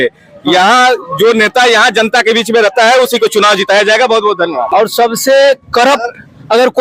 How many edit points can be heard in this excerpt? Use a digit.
1